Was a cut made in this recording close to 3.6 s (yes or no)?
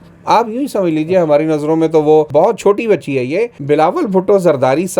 yes